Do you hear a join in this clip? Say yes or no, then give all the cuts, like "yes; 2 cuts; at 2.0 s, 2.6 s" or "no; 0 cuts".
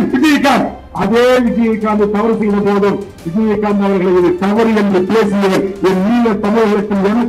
no; 0 cuts